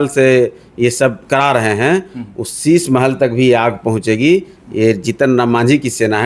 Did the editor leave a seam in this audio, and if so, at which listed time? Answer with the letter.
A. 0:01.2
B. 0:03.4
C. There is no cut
A